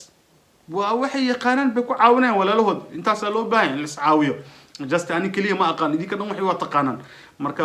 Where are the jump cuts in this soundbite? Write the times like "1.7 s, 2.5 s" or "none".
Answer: none